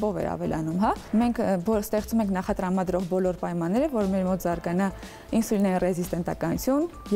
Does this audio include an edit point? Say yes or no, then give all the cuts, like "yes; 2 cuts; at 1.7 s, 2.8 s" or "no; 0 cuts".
yes; 1 cut; at 1.0 s